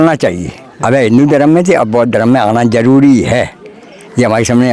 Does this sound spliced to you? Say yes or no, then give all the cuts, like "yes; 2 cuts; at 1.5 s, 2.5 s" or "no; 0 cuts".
no; 0 cuts